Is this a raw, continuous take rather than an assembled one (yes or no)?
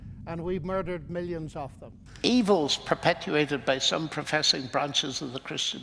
no